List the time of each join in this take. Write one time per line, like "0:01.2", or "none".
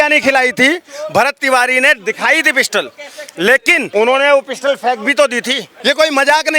0:03.9
0:05.7